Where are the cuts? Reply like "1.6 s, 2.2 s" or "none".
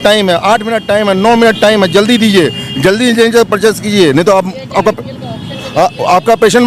none